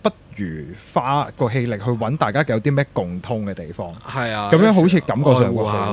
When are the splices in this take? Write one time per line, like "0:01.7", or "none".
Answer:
none